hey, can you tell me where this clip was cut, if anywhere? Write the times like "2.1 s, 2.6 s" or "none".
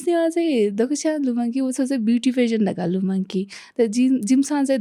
none